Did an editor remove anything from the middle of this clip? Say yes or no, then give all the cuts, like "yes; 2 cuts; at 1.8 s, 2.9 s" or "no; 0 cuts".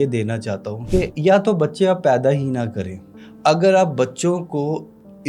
no; 0 cuts